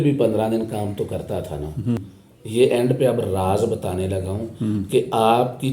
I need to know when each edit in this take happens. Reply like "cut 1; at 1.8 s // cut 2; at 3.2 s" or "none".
cut 1; at 2.0 s